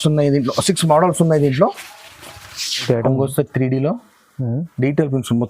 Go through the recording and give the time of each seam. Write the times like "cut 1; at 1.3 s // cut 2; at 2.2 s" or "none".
cut 1; at 2.8 s